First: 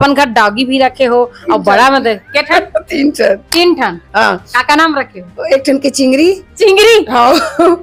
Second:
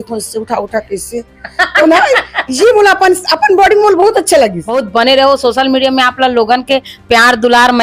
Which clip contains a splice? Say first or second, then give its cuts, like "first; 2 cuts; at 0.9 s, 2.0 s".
second; 1 cut; at 4.7 s